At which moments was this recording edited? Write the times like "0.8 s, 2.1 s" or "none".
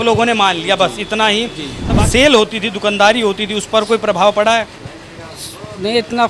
1.8 s